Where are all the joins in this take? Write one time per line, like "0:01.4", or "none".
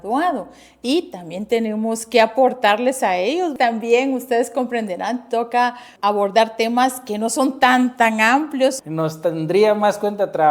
0:03.5
0:05.9
0:08.8